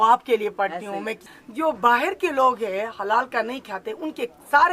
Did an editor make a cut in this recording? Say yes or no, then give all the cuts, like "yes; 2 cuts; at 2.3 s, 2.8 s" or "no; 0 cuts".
yes; 1 cut; at 1.3 s